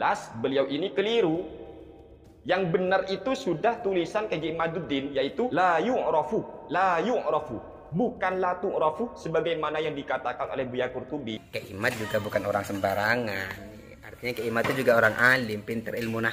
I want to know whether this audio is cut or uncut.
cut